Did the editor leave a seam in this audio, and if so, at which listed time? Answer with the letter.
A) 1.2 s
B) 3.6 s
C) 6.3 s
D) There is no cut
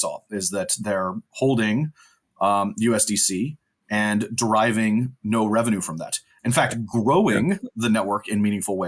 D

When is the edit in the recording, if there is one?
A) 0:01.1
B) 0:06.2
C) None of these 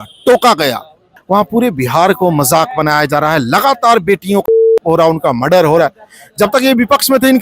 A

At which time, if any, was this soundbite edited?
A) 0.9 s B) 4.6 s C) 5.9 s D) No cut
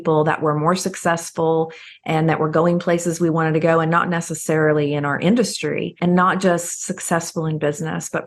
C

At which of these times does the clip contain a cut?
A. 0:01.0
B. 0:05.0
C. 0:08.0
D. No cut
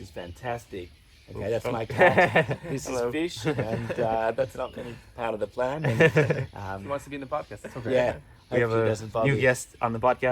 A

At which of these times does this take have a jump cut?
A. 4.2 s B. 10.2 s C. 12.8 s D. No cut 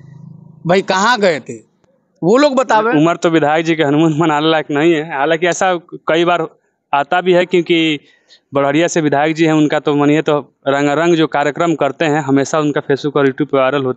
D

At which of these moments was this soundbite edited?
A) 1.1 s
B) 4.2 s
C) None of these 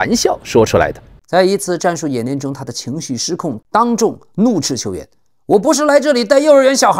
A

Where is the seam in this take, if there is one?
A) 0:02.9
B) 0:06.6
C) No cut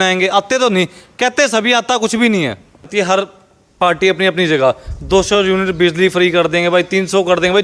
A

